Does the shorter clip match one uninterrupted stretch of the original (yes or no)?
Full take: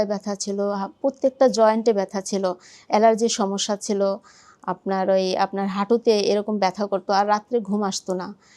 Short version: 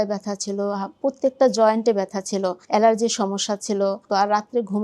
no